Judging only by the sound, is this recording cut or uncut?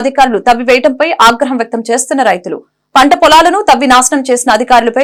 uncut